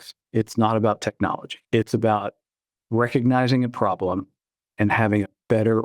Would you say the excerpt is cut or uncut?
cut